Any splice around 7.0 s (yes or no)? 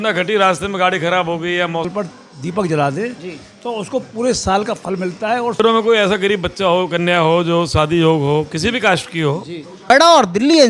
no